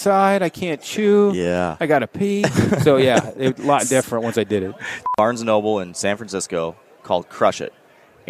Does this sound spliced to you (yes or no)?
yes